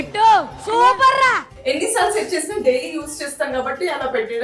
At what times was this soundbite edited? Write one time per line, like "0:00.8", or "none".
0:01.5

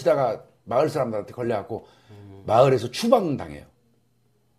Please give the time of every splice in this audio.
0:02.9

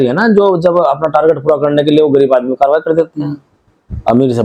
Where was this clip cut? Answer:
none

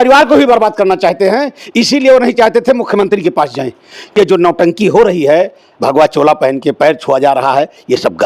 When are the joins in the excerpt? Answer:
0:04.1

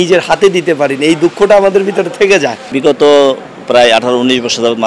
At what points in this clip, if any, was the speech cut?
none

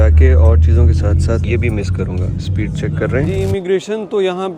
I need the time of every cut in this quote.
0:01.4
0:03.3

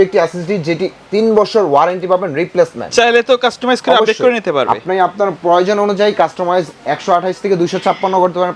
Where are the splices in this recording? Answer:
none

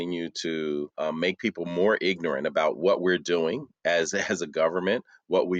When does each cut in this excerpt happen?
0:00.9

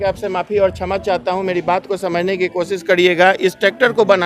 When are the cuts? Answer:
none

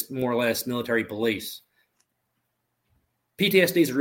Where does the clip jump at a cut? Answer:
0:01.9

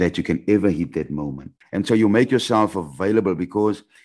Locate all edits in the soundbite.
0:01.5

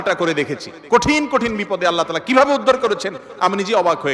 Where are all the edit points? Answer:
none

